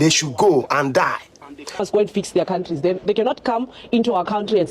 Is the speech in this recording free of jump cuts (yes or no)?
no